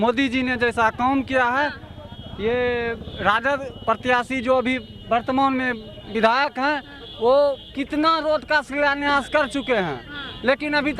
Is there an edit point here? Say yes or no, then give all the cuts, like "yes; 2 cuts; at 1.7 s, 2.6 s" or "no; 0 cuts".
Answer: no; 0 cuts